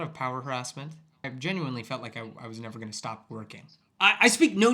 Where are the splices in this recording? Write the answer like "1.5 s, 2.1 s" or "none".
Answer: 1.3 s, 3.9 s